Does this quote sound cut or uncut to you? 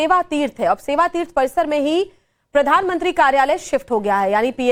uncut